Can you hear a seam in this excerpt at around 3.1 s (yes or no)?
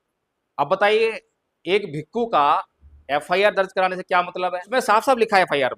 no